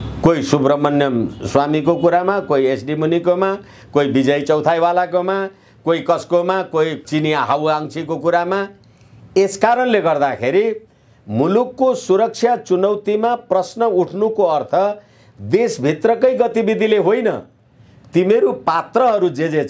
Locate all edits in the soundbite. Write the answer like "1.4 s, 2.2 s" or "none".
7.0 s